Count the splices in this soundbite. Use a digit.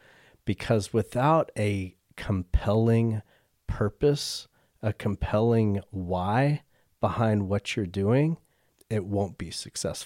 0